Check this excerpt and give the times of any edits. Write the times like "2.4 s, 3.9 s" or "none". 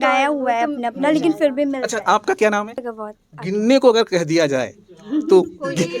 2.9 s